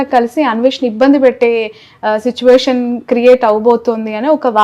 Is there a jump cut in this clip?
no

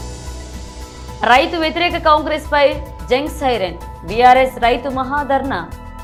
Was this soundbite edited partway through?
no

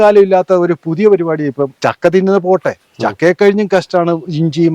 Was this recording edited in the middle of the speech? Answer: yes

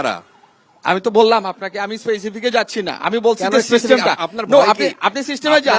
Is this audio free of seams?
yes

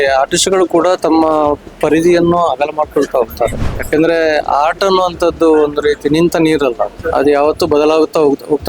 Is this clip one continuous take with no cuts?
no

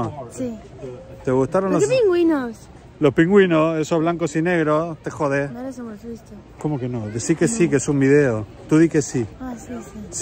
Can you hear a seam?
no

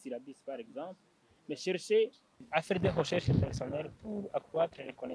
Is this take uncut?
no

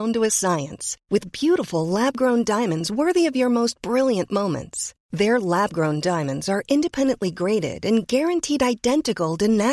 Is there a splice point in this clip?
no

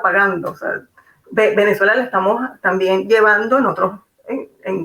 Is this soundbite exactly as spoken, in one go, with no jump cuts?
yes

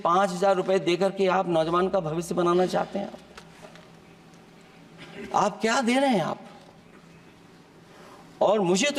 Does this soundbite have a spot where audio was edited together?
no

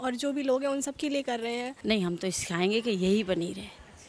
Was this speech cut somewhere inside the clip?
yes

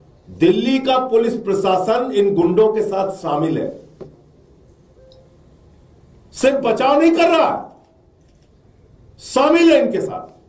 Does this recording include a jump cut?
no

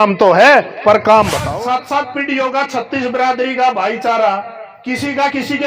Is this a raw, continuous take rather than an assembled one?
no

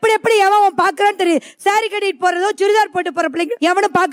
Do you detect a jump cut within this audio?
no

